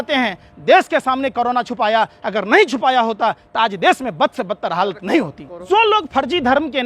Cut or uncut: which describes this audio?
cut